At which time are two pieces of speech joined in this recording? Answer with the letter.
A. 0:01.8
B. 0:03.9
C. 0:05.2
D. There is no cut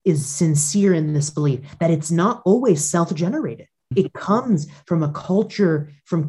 B